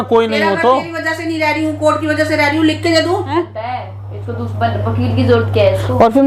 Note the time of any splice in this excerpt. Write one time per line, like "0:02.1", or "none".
0:03.3